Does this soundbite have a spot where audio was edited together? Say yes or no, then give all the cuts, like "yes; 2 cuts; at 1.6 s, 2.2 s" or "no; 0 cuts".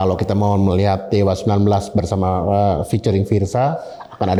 no; 0 cuts